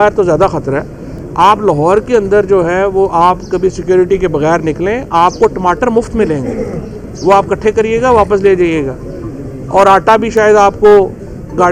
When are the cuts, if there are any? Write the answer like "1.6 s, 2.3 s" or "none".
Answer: none

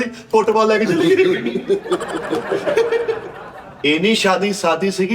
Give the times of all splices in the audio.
3.7 s

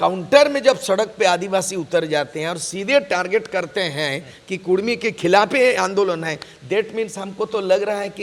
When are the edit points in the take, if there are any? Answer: none

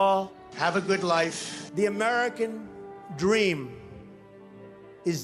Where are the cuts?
none

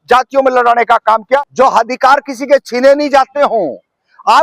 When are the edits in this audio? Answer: 1.4 s

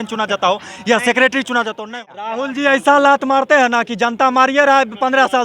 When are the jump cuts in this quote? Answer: 1.9 s

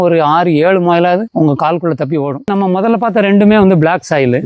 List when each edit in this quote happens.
1.3 s, 2.5 s

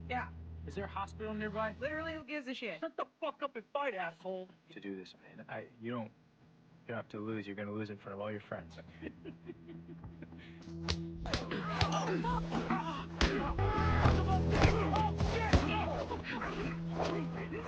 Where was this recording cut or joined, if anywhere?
15.9 s

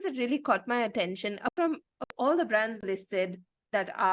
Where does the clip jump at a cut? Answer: 1.5 s, 2.8 s

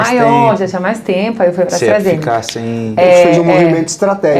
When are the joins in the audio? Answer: none

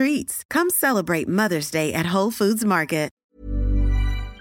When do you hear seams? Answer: 3.1 s

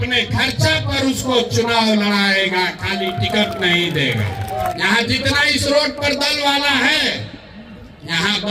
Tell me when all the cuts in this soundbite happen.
4.7 s

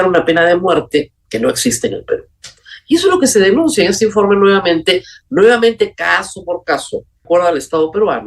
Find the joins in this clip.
7.2 s

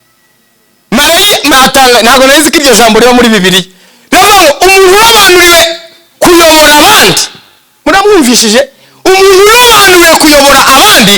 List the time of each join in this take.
1.5 s

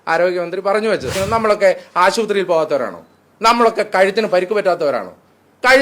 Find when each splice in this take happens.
1.2 s

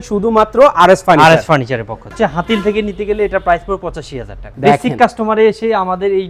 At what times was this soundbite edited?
2.1 s, 4.4 s

